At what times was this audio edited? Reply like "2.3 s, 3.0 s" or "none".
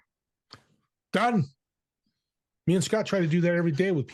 none